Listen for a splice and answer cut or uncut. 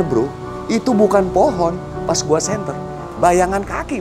cut